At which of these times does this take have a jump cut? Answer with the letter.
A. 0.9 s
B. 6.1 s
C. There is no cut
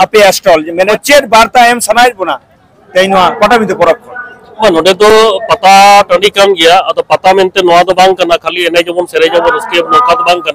A